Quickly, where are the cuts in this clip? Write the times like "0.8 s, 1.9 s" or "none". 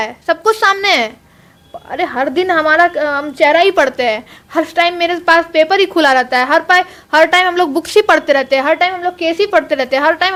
none